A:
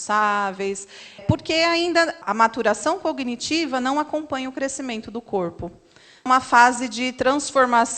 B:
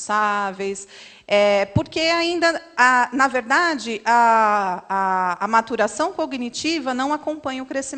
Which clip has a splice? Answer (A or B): A